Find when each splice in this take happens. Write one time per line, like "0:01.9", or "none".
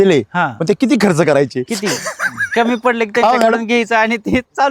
none